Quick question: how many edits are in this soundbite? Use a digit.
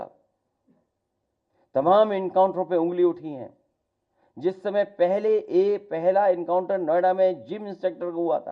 0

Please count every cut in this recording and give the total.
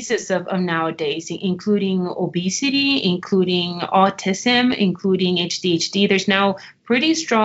0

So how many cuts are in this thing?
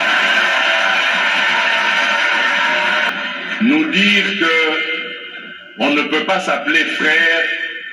1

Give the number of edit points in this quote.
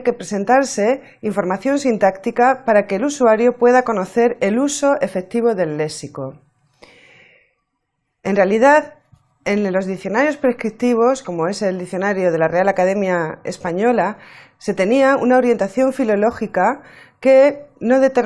1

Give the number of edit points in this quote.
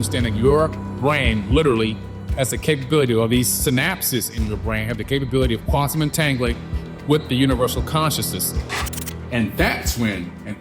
1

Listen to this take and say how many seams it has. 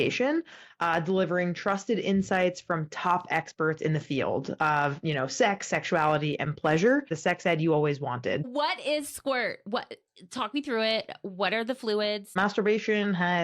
3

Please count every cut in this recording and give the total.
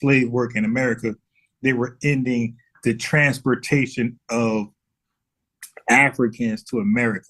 1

